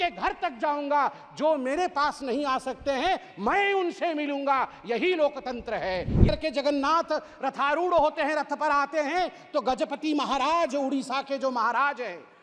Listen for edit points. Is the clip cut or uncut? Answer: cut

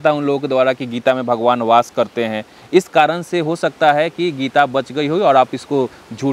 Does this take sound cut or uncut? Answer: uncut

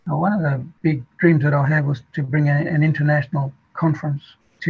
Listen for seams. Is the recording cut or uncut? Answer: uncut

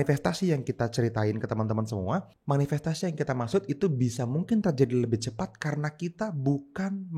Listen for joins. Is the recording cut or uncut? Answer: cut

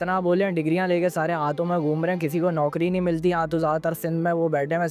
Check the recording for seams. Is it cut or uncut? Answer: uncut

